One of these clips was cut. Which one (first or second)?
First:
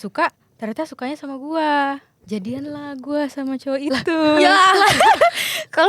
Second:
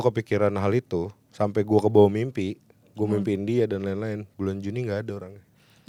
first